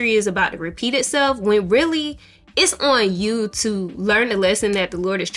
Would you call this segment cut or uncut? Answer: uncut